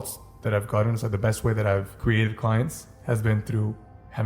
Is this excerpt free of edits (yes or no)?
no